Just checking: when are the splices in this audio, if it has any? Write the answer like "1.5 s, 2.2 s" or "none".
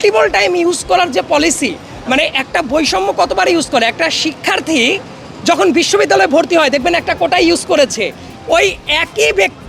none

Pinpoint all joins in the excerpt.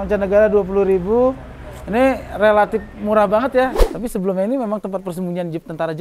3.8 s

